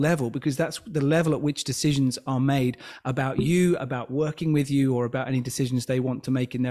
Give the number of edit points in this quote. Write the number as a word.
zero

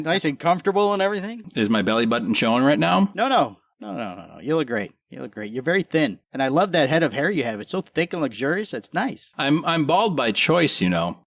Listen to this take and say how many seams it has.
three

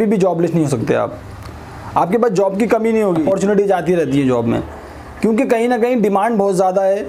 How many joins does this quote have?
one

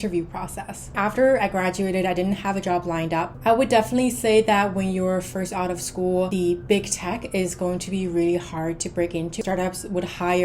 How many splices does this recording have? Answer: four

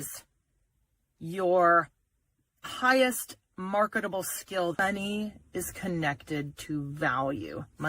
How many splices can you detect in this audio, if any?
one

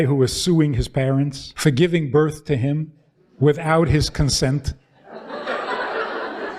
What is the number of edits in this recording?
one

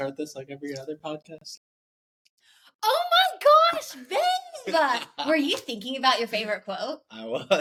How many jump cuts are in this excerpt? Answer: zero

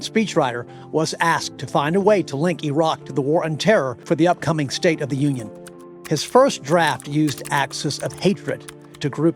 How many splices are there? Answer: one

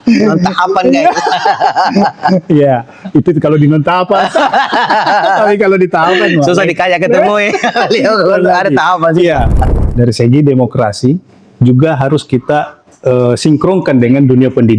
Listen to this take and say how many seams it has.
one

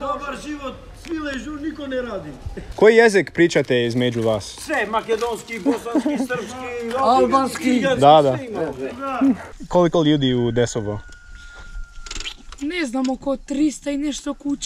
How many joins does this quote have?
two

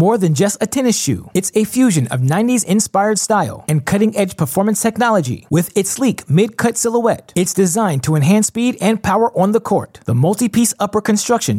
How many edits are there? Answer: zero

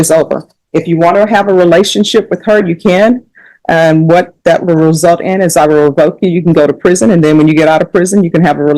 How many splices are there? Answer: zero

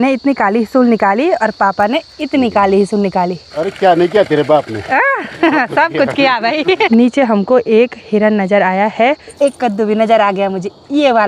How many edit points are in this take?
three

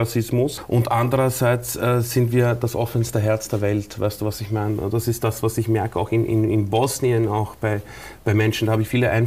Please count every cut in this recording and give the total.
zero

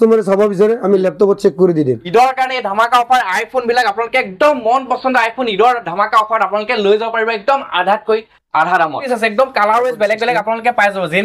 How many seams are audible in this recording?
two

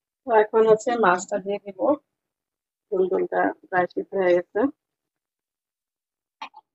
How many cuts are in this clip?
zero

